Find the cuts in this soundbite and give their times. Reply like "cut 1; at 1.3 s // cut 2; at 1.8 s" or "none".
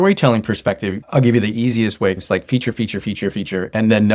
cut 1; at 0.9 s // cut 2; at 2.2 s